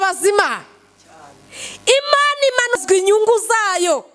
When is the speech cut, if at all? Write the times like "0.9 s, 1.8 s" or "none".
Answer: 2.8 s

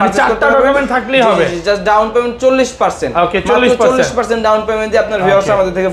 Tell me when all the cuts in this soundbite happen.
none

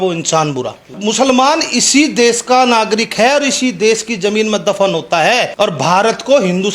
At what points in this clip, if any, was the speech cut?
0.9 s, 5.5 s

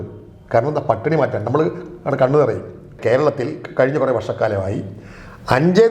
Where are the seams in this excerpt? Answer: 2.9 s

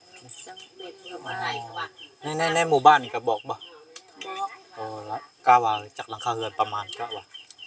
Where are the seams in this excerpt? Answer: none

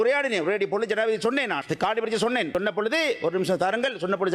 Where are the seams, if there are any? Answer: 1.6 s, 2.5 s

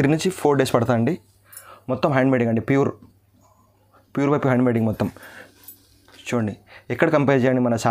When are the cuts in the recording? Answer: none

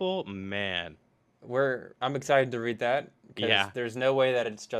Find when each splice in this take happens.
none

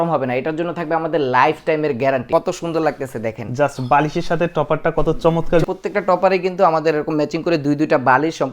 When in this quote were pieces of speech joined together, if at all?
2.3 s, 5.6 s

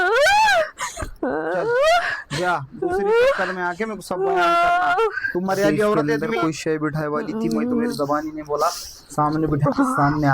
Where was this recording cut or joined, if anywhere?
6.2 s

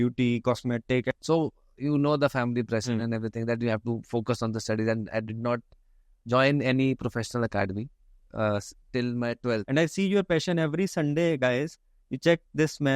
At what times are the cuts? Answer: 1.1 s, 9.6 s

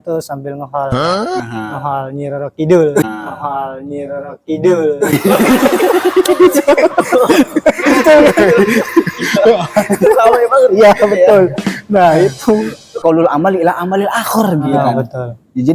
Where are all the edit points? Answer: 13.0 s

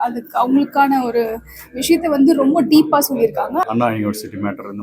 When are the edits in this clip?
3.6 s

